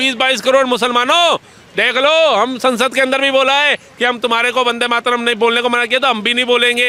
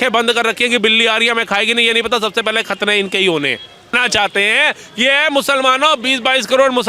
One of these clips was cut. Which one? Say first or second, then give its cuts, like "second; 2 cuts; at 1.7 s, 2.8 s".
second; 1 cut; at 4.0 s